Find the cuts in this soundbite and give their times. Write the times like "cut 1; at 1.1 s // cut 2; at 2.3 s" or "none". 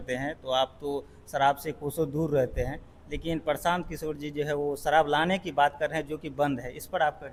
none